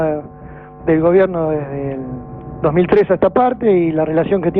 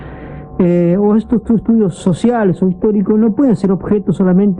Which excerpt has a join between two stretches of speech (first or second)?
second